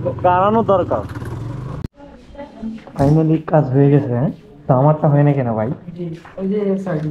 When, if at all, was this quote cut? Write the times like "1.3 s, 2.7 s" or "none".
1.8 s